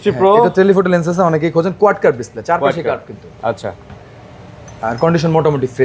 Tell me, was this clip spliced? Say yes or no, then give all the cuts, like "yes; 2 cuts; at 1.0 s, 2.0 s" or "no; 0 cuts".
no; 0 cuts